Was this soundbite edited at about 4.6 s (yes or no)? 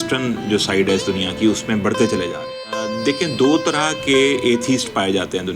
no